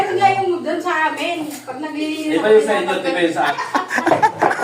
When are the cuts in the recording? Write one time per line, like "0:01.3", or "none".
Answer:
0:03.5

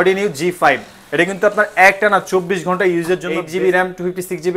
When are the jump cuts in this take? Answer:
0:03.3

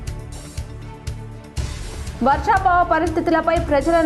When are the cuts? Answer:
0:01.8

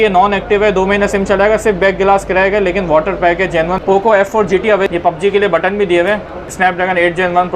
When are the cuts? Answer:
0:03.8
0:04.9
0:06.5

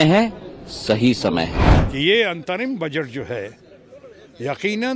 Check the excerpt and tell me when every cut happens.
0:01.6

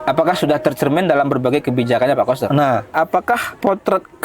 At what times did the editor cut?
0:03.3

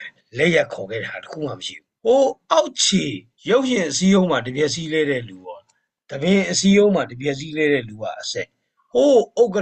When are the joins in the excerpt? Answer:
0:01.9

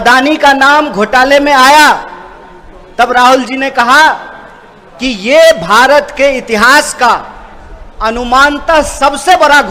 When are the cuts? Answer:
none

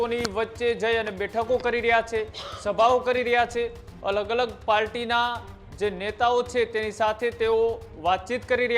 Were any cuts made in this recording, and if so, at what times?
none

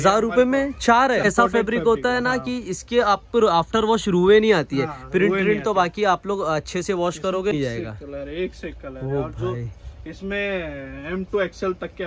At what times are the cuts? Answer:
0:01.2
0:07.5

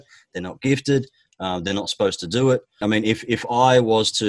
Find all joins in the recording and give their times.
0:02.8

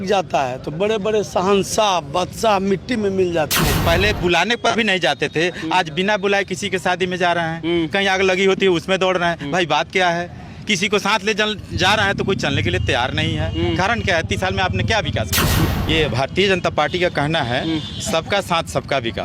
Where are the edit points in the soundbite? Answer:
0:03.8
0:15.6

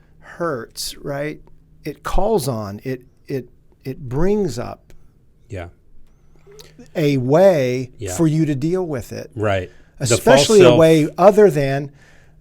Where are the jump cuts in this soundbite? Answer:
0:01.5

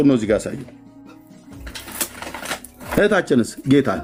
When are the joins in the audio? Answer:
none

